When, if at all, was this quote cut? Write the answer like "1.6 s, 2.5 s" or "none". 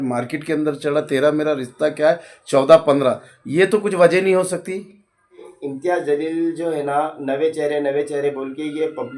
5.5 s